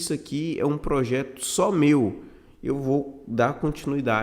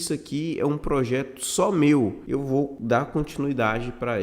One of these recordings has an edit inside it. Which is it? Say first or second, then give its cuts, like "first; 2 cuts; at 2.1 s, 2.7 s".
second; 1 cut; at 2.6 s